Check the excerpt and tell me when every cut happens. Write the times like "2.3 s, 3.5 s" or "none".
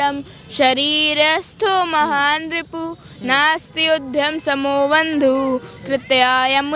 none